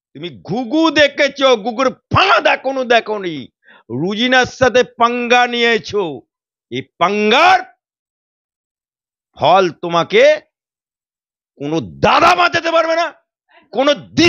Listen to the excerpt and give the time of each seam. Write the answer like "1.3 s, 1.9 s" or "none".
none